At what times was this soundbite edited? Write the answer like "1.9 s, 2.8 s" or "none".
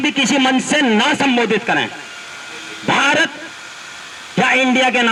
none